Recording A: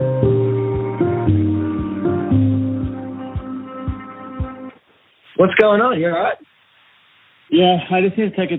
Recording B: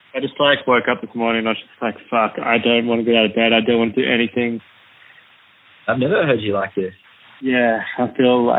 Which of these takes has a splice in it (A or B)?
B